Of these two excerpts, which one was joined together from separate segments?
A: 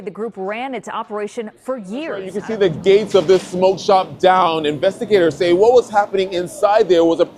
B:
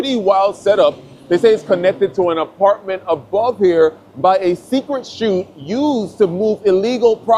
A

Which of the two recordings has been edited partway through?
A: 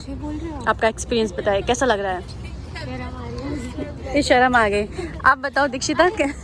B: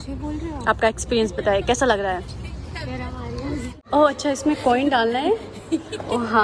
B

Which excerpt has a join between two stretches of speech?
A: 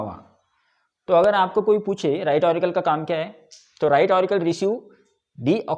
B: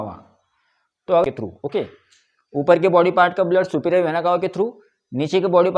B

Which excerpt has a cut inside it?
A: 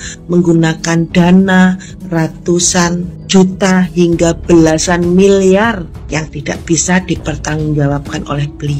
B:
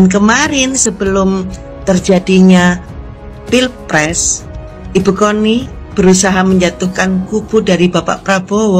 A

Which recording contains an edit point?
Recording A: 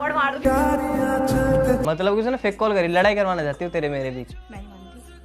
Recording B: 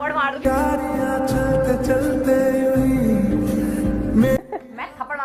A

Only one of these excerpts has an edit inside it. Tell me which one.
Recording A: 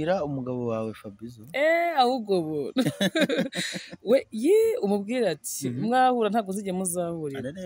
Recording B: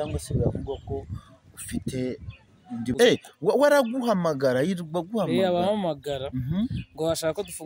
B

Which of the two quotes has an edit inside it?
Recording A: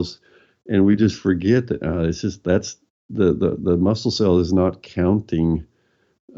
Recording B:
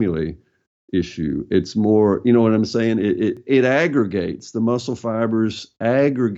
B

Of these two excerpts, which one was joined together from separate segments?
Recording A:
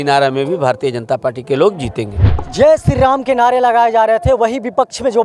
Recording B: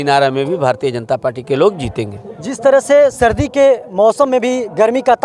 A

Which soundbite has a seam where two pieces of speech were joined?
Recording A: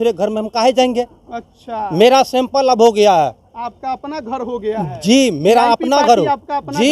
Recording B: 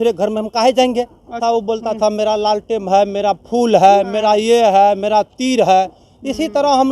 B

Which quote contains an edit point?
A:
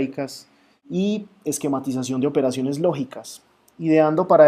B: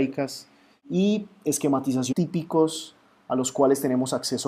A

